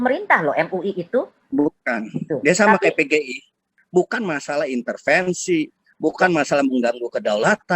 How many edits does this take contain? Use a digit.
1